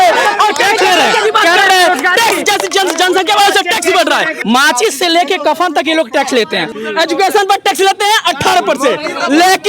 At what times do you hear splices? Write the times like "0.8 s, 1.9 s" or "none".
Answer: 4.3 s, 6.7 s